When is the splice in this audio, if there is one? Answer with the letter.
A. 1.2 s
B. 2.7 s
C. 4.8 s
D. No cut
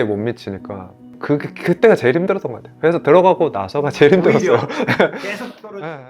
A